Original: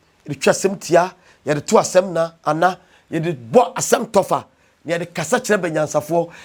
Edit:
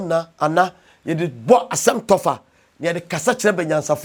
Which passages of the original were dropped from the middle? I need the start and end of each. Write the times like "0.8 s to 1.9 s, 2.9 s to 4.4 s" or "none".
none